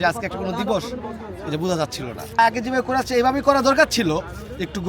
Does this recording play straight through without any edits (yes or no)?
no